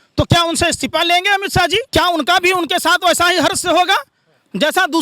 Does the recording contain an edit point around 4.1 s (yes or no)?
no